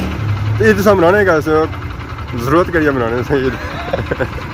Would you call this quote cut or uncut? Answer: uncut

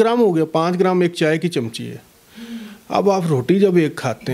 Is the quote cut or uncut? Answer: uncut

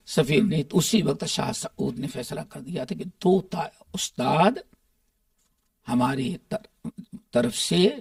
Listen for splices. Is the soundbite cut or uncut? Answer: uncut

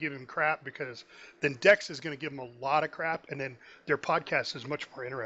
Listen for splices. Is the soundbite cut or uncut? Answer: uncut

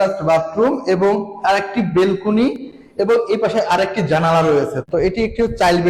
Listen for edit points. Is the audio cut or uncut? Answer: cut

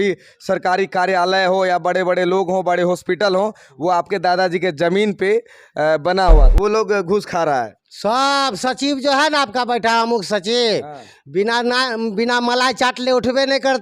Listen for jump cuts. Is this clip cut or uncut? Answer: cut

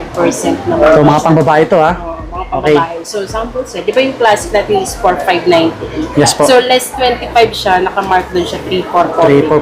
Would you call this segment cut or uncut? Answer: uncut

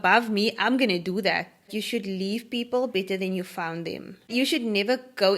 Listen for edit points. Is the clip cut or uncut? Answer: cut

